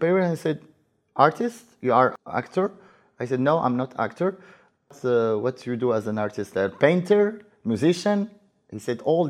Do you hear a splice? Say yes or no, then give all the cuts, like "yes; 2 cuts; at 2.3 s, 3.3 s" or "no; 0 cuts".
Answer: yes; 2 cuts; at 2.1 s, 4.9 s